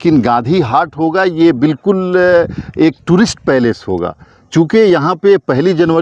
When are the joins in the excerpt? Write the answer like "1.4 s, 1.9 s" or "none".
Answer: none